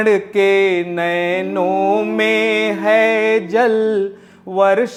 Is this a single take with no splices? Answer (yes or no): yes